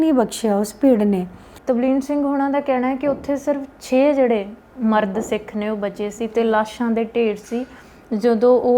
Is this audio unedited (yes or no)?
no